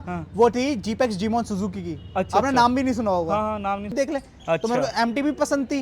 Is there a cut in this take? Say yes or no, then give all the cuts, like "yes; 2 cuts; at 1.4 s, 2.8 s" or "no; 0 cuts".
yes; 1 cut; at 3.9 s